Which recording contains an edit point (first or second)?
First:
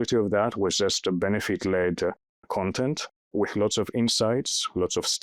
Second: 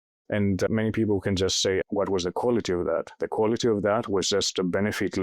second